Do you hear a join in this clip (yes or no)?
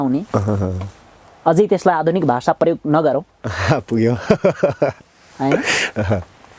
no